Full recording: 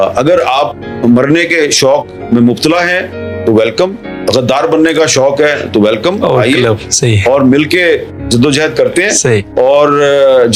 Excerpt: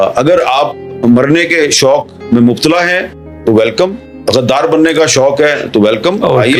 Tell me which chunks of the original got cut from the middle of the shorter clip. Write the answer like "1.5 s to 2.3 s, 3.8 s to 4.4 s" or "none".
none